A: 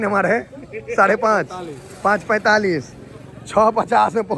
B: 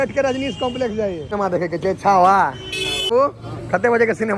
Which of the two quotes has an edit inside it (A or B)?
B